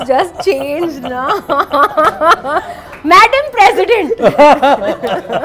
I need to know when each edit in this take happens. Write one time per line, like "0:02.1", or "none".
none